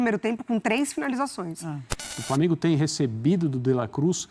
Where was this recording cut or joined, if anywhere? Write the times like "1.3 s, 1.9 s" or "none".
2.2 s